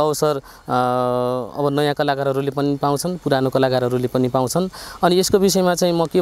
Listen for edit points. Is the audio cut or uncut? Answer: uncut